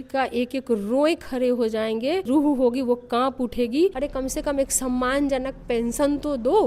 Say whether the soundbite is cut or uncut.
cut